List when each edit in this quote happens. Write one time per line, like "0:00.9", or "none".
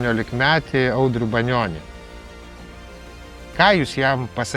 none